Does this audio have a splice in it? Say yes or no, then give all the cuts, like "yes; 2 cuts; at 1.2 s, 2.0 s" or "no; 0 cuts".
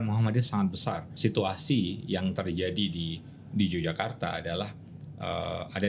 yes; 1 cut; at 1.1 s